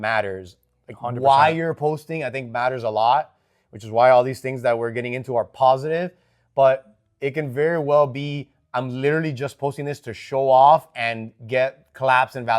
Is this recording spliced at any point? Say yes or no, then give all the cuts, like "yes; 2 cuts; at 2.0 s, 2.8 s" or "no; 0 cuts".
no; 0 cuts